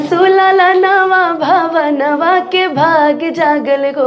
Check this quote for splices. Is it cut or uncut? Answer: uncut